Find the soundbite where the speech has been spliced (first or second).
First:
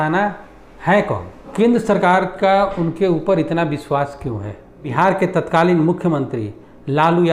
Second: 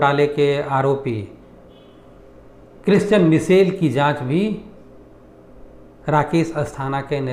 first